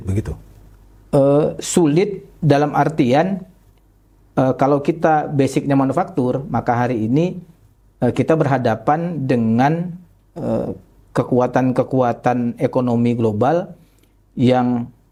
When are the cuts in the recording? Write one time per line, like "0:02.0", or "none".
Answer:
none